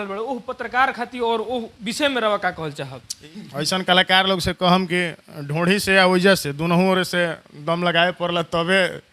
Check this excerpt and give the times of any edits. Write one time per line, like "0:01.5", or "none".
0:03.3